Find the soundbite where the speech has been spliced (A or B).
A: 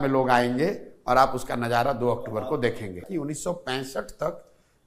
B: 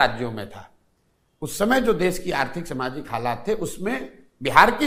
A